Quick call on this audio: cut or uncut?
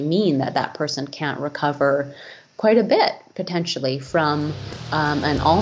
uncut